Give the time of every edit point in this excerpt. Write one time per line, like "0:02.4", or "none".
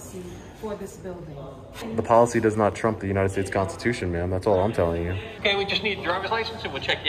0:01.9
0:05.2